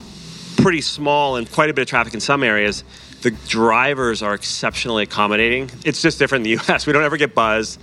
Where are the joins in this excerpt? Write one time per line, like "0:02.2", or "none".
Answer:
0:01.5
0:05.7